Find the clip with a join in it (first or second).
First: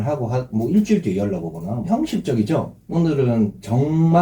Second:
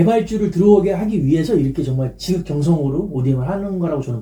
first